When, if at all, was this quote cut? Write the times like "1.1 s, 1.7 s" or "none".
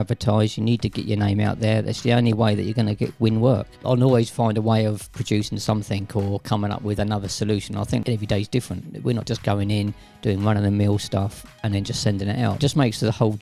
3.8 s, 8.0 s, 12.6 s